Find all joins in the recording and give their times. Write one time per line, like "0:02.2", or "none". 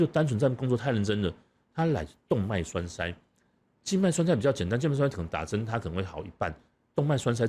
none